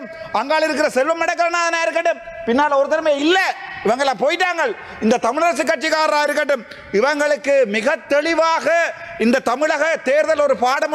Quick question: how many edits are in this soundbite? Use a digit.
0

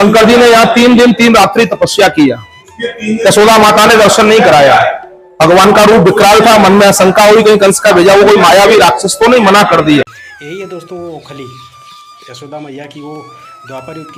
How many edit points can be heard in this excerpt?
1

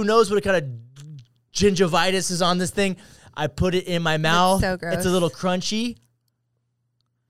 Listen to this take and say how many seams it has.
0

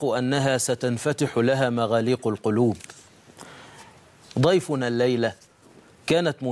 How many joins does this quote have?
1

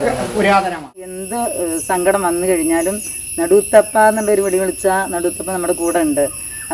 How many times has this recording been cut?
1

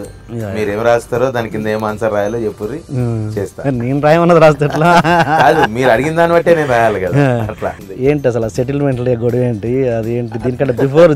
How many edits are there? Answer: 1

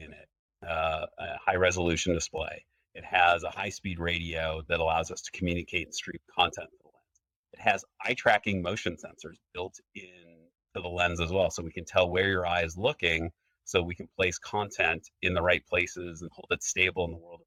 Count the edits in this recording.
0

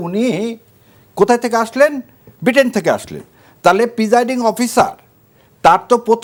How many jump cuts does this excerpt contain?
0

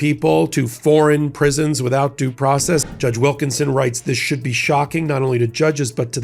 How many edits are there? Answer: 1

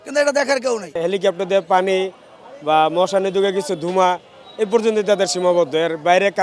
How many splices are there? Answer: 1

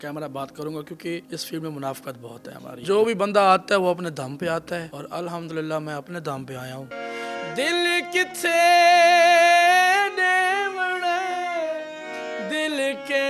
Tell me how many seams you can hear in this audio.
4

